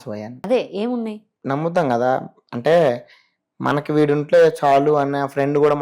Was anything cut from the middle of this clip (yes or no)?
yes